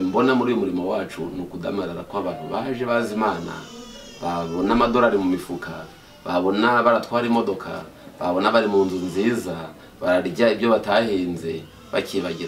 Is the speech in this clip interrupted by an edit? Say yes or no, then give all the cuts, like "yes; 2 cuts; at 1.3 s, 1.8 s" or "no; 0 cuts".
no; 0 cuts